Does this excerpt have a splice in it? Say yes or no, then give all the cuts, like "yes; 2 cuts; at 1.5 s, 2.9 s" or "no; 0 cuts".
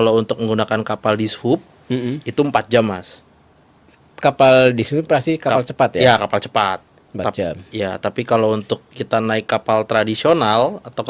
no; 0 cuts